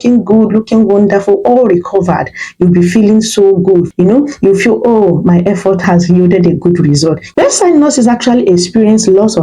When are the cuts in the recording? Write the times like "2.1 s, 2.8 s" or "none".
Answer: 7.2 s